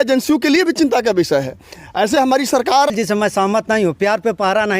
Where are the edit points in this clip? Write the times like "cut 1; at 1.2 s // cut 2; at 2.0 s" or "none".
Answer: cut 1; at 2.9 s